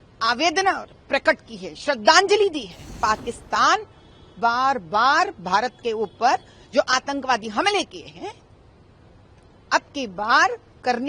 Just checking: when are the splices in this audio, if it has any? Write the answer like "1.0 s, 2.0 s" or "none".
2.9 s